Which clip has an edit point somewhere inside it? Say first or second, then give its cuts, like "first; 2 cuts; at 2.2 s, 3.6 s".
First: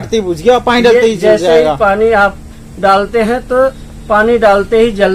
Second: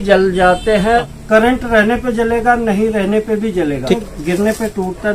second; 2 cuts; at 1.1 s, 4.0 s